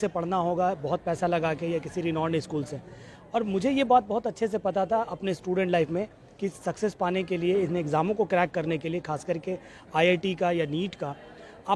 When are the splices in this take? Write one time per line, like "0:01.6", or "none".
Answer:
none